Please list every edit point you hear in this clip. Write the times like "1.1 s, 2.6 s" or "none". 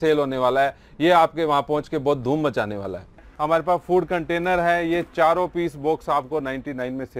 3.3 s